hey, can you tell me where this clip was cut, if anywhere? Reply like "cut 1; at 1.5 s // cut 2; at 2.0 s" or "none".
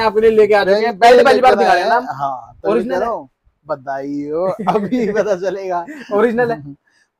none